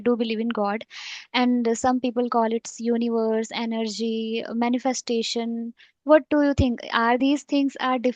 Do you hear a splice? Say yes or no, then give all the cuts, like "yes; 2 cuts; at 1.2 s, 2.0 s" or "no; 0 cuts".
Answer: yes; 1 cut; at 7.2 s